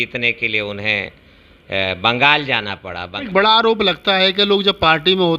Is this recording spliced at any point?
yes; 1 cut; at 3.2 s

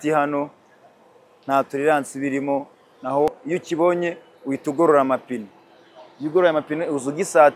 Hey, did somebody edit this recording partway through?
yes; 1 cut; at 3.3 s

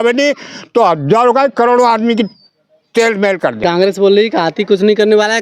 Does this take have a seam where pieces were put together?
yes; 1 cut; at 3.6 s

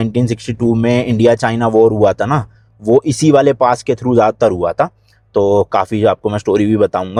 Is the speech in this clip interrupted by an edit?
no; 0 cuts

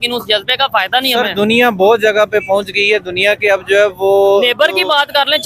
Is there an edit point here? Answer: no; 0 cuts

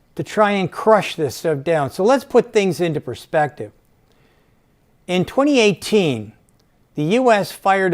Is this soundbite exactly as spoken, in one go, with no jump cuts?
yes; 0 cuts

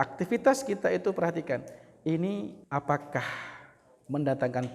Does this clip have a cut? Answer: yes; 1 cut; at 2.6 s

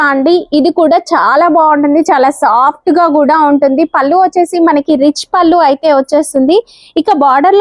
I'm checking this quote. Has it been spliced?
no; 0 cuts

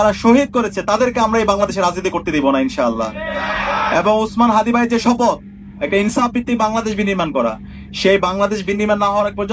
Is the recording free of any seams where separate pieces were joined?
yes; 0 cuts

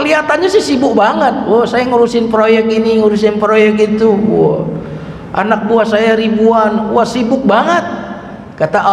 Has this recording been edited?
no; 0 cuts

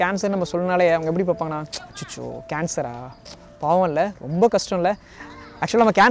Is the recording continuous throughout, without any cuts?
yes; 0 cuts

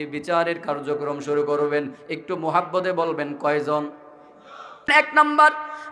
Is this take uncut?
no; 1 cut; at 4.9 s

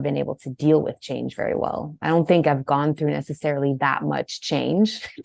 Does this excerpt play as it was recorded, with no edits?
yes; 0 cuts

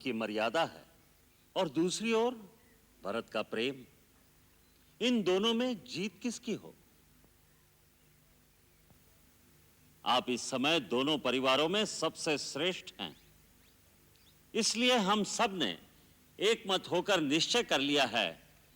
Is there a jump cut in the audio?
no; 0 cuts

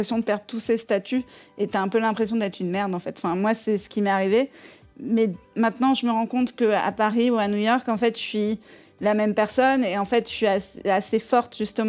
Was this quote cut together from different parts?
yes; 1 cut; at 5.4 s

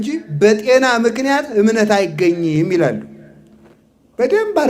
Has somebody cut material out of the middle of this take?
no; 0 cuts

